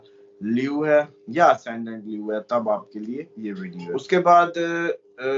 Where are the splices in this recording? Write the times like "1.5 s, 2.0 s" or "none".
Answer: 3.9 s